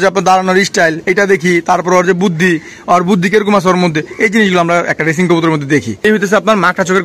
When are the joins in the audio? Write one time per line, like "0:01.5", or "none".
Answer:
0:06.0